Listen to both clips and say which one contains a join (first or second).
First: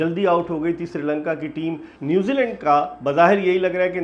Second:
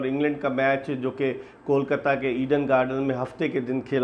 first